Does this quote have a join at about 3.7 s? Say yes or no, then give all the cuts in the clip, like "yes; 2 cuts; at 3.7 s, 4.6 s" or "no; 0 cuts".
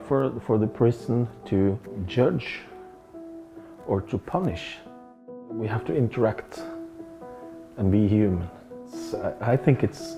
no; 3 cuts; at 2.0 s, 5.2 s, 9.0 s